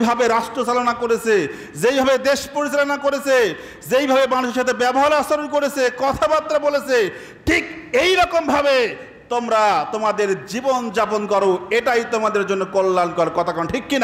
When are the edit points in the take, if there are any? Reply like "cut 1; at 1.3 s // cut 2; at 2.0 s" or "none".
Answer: none

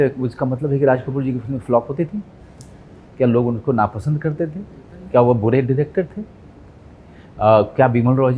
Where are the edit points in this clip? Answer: none

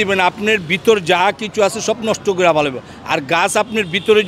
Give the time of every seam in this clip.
none

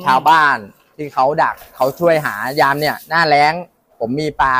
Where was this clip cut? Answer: none

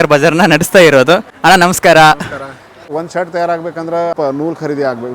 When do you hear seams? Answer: cut 1; at 1.3 s // cut 2; at 2.7 s // cut 3; at 4.1 s

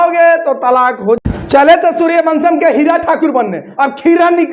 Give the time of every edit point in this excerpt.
cut 1; at 1.2 s

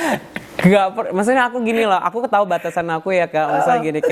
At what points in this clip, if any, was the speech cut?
none

